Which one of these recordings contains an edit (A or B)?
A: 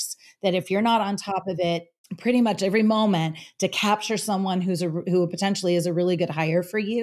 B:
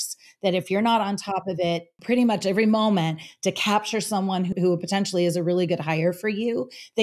B